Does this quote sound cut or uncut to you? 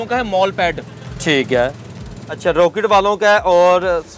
cut